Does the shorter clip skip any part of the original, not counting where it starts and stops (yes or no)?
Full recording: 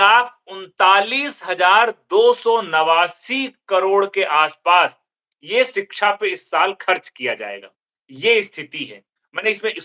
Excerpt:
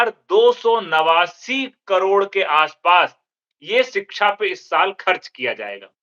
no